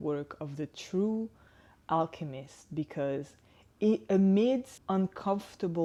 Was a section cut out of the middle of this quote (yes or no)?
no